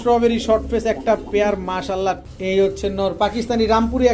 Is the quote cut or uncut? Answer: cut